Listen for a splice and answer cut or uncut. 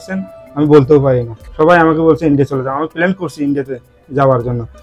cut